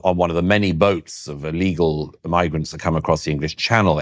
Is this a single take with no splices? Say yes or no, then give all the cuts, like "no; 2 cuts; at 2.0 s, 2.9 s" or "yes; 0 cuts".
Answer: yes; 0 cuts